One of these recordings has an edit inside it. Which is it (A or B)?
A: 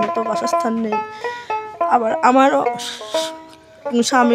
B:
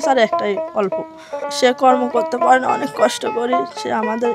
B